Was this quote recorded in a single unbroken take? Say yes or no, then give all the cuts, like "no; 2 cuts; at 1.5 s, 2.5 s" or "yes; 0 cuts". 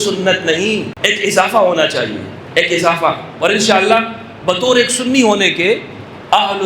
no; 2 cuts; at 0.9 s, 2.3 s